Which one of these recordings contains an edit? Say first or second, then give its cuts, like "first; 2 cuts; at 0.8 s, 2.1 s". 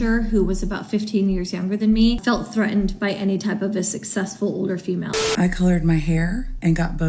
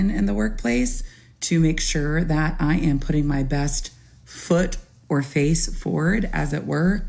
first; 2 cuts; at 2.2 s, 5.2 s